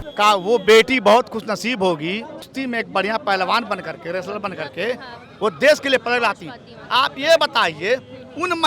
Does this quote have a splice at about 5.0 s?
no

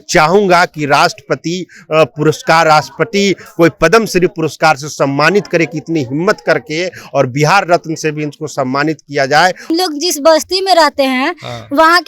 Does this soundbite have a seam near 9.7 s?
yes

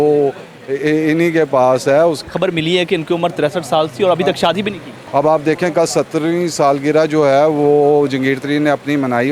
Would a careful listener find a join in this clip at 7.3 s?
no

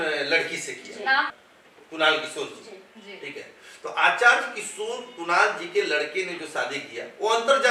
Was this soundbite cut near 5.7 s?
no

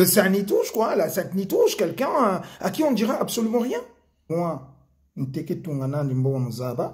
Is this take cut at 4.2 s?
yes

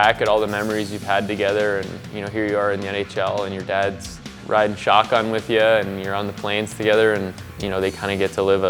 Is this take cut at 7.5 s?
yes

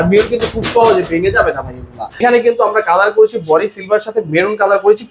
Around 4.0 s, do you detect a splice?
no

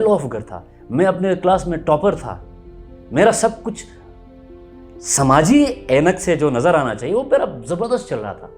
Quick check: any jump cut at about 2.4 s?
no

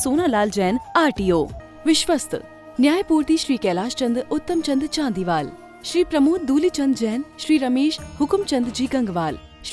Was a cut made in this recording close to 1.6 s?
yes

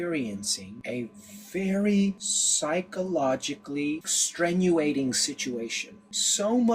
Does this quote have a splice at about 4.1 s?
yes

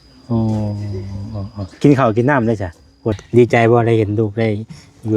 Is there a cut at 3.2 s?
yes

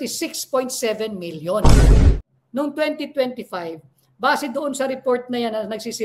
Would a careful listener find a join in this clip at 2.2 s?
yes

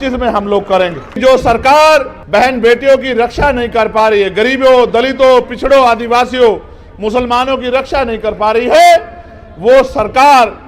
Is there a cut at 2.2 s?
yes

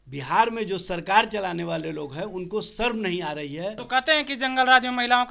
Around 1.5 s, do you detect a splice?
no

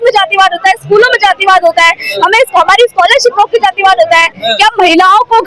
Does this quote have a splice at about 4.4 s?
yes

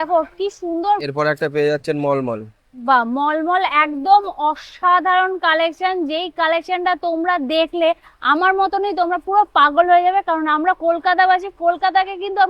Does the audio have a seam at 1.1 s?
yes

